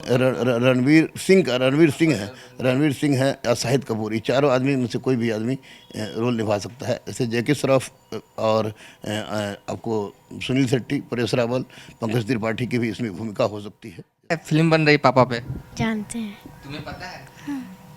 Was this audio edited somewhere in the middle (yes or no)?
yes